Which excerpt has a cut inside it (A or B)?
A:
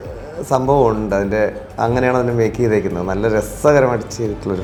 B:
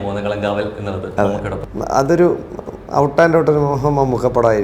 B